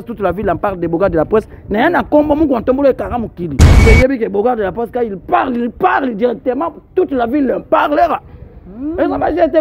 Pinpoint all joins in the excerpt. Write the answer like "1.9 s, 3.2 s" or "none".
3.8 s